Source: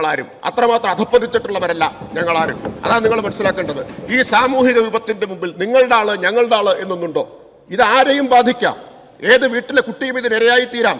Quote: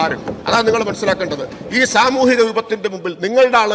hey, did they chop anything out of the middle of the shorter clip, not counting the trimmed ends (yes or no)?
no